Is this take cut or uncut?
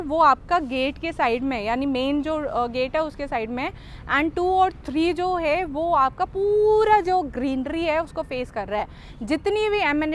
uncut